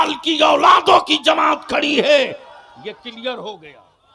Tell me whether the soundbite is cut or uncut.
uncut